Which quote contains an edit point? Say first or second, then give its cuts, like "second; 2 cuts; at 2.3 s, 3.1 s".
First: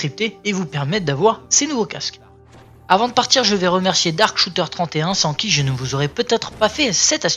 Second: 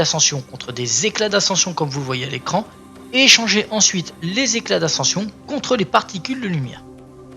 second; 1 cut; at 5.9 s